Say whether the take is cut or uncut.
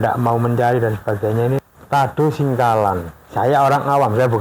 cut